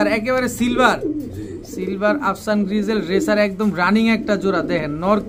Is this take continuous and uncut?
yes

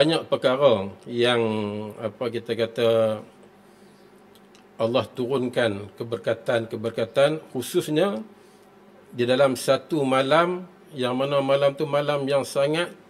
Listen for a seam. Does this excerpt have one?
no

